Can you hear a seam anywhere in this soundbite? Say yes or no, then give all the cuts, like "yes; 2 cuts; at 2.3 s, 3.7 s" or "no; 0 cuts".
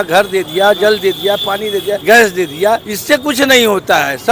yes; 2 cuts; at 2.0 s, 2.9 s